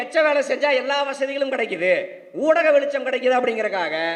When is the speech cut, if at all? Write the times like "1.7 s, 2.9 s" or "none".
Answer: none

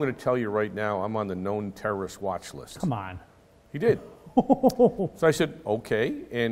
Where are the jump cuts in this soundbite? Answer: none

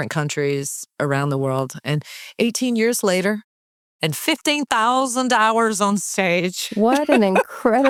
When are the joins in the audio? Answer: none

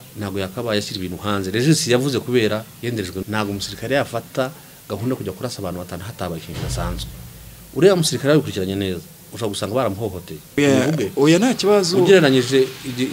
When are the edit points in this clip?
3.2 s, 10.6 s

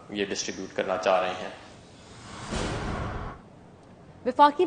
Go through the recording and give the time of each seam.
none

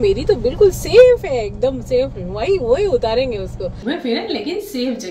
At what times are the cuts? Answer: 3.8 s

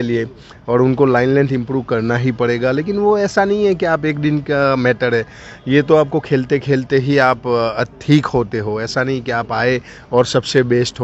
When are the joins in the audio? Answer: none

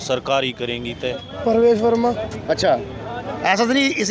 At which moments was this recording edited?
1.2 s

